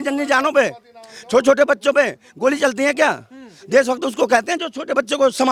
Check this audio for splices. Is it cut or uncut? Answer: uncut